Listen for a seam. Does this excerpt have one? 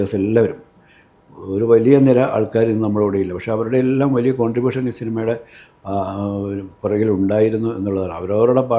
no; 0 cuts

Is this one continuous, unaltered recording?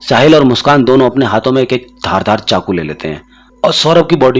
yes; 0 cuts

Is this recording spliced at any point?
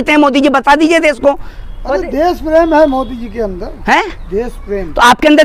no; 0 cuts

